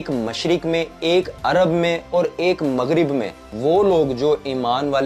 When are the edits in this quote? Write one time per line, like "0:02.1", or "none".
0:03.5

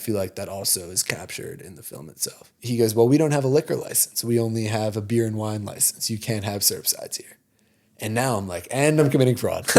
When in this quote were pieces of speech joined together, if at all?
0:02.5

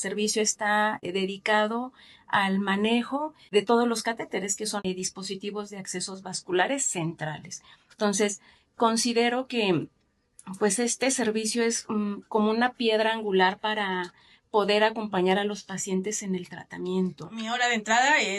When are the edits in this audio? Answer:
0:17.5

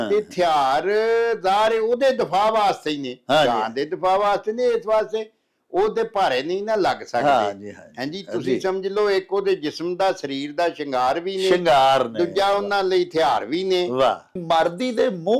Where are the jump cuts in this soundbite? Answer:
0:14.4

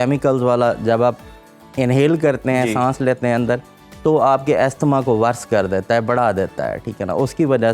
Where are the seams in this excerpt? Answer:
none

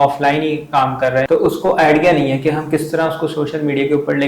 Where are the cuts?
0:01.3

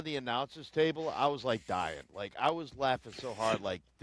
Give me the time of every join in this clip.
none

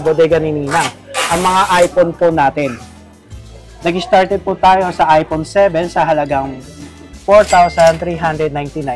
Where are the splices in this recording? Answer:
none

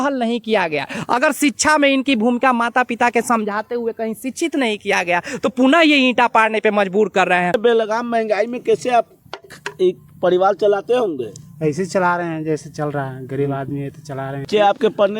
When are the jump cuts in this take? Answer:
0:07.6

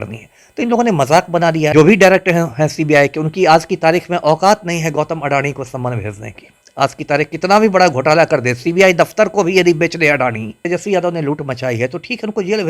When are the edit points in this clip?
0:01.7
0:10.6

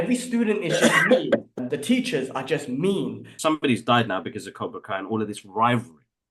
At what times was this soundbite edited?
0:01.5
0:03.3

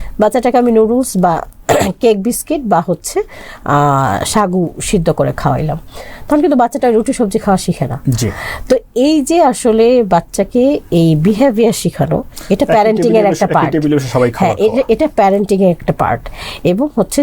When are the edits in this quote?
none

